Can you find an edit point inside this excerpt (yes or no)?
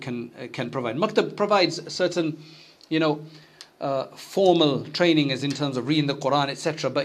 no